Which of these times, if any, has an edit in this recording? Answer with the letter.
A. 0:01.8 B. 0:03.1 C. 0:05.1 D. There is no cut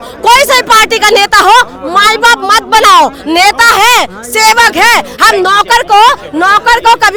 D